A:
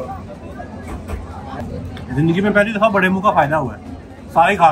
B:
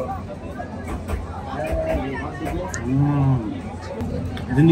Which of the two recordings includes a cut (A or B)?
A